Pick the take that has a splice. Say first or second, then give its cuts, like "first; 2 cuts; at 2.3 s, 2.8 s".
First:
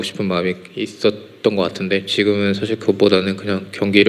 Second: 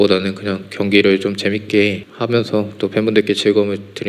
second; 1 cut; at 2.1 s